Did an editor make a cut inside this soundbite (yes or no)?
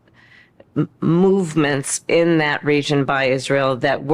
yes